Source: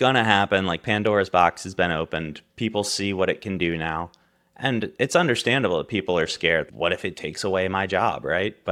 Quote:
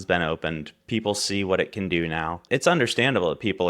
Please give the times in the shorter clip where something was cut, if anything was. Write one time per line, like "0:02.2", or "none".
0:02.4